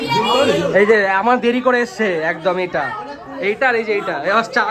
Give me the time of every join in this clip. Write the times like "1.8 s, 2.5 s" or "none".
none